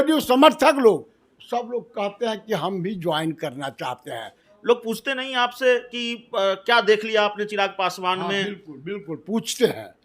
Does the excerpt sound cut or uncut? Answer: cut